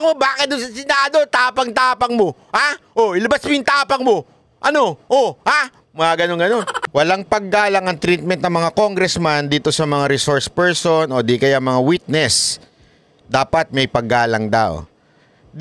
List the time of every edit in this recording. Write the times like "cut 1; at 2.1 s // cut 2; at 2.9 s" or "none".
cut 1; at 6.8 s

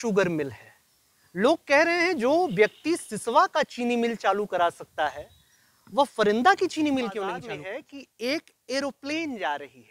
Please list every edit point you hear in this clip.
cut 1; at 7.4 s

